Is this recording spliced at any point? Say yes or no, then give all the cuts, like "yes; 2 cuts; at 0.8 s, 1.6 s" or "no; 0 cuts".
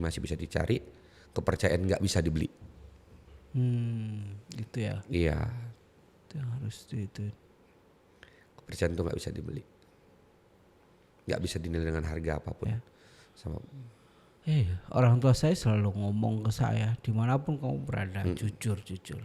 no; 0 cuts